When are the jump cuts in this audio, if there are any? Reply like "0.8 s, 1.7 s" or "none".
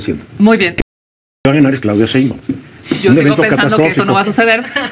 1.4 s